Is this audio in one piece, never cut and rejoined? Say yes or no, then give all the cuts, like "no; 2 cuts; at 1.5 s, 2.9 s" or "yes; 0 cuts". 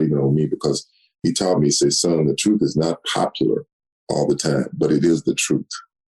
no; 1 cut; at 1.2 s